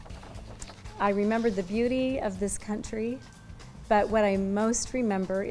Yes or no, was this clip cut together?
no